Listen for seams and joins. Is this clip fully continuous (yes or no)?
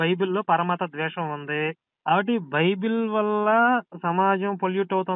no